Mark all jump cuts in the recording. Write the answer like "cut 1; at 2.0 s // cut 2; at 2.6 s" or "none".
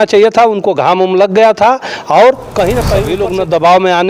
cut 1; at 3.1 s